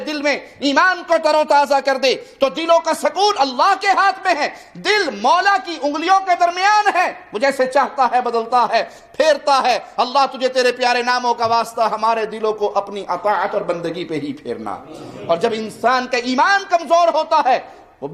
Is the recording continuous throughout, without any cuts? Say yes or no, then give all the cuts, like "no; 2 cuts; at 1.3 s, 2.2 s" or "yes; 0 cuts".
yes; 0 cuts